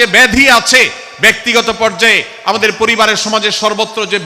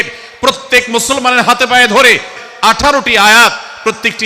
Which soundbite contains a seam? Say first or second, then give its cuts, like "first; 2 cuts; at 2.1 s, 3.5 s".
second; 1 cut; at 2.4 s